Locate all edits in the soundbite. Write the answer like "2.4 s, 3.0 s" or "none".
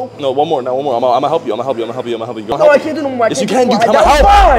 2.5 s